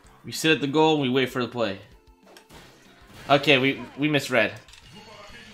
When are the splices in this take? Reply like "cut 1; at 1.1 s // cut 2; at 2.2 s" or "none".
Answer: cut 1; at 4.6 s